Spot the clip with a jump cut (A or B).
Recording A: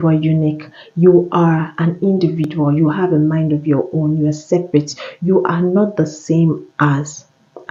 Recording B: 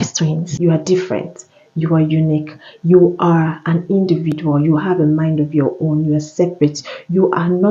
B